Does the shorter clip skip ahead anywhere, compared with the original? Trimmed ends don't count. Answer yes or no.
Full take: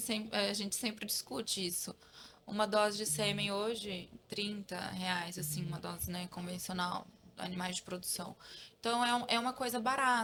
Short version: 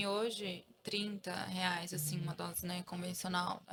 no